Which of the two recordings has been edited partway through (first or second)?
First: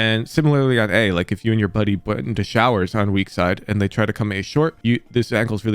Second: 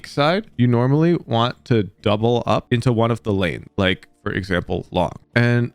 first